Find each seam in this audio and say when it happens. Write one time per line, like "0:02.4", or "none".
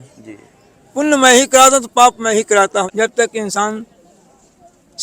0:02.9